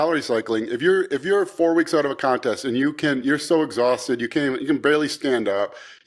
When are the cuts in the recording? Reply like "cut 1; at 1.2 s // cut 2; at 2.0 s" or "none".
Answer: none